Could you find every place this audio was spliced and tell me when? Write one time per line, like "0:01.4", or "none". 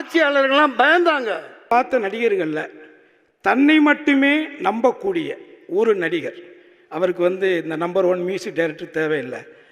0:01.7